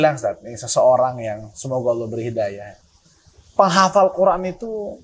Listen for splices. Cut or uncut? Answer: uncut